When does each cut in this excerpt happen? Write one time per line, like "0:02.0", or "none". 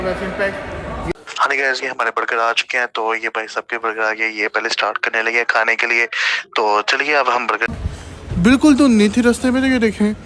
0:01.2
0:07.7